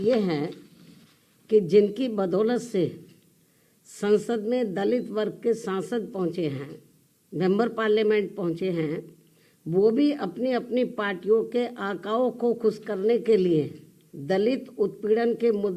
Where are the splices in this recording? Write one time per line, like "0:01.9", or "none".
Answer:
none